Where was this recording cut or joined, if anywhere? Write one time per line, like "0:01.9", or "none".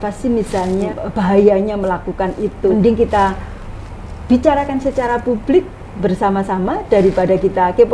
0:01.0
0:02.7